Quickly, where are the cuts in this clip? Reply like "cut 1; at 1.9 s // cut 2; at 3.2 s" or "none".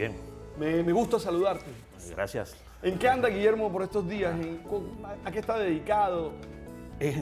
cut 1; at 3.6 s

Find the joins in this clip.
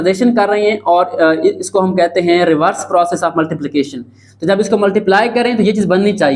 none

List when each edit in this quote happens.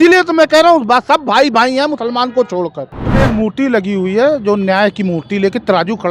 cut 1; at 3.1 s

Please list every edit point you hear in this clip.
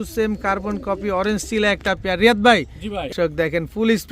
cut 1; at 3.1 s

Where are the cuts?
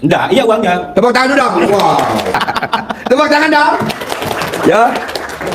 cut 1; at 2.4 s

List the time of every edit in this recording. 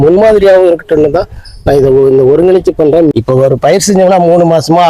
cut 1; at 3.1 s

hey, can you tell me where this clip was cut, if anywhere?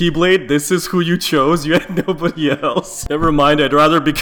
cut 1; at 2.6 s

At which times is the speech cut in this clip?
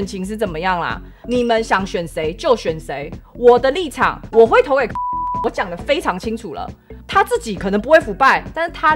cut 1; at 1.2 s // cut 2; at 7.0 s

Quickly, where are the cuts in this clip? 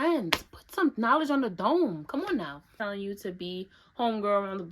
cut 1; at 2.7 s

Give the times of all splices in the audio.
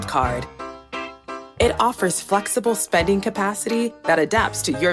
none

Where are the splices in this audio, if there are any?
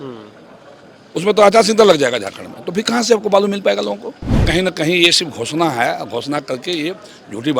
cut 1; at 4.5 s

